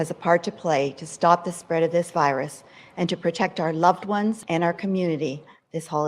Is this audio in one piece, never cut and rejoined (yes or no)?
no